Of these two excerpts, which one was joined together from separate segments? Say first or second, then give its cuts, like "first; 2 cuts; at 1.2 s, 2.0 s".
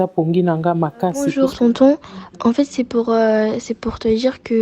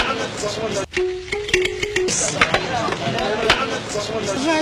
first; 1 cut; at 1.3 s